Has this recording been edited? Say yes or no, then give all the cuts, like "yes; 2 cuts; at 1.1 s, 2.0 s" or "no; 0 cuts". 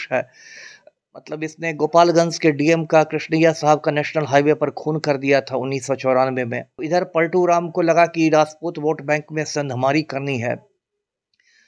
yes; 1 cut; at 6.7 s